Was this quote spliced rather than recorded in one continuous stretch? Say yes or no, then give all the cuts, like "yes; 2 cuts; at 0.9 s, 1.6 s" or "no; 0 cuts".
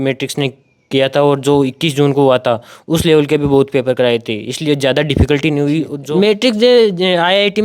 yes; 1 cut; at 6.0 s